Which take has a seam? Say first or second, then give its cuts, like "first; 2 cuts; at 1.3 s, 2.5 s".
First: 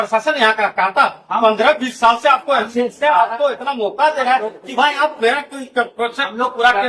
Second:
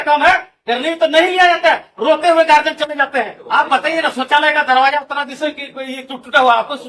second; 1 cut; at 3.4 s